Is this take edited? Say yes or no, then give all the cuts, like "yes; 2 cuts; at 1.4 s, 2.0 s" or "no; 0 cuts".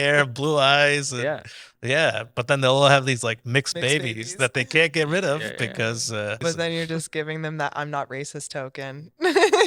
yes; 1 cut; at 6.4 s